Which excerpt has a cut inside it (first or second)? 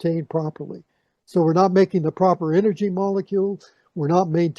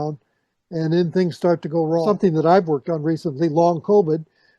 second